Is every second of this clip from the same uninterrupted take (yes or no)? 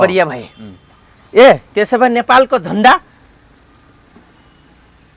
yes